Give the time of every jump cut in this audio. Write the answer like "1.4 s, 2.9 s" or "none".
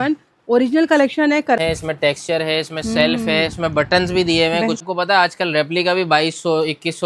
1.6 s, 4.8 s